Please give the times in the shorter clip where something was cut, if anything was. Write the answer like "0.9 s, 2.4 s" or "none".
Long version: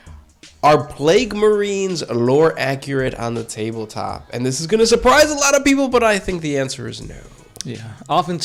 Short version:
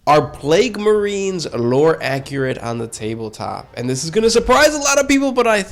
none

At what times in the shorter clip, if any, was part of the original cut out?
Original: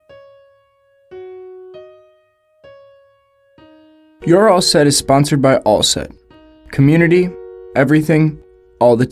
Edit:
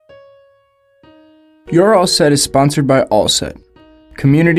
0.9 s

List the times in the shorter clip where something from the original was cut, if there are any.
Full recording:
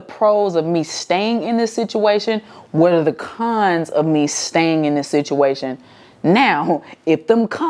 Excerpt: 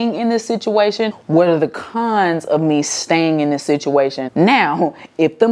1.2 s, 4.2 s

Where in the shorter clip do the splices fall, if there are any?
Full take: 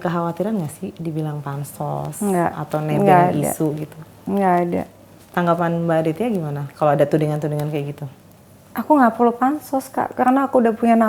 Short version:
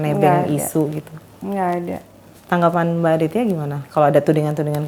none

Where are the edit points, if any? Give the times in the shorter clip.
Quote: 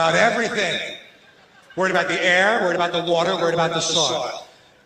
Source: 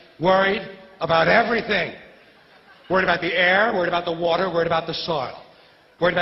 none

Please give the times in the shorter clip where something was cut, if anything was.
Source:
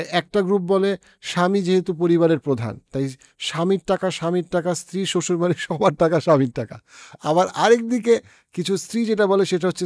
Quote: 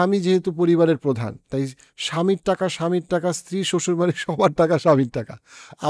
none

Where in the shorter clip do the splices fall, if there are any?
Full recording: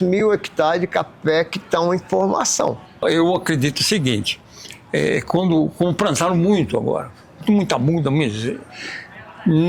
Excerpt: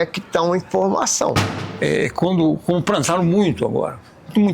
1.5 s

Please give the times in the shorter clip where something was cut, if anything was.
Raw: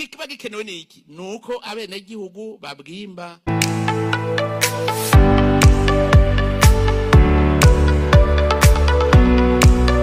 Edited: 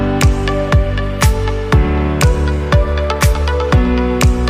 none

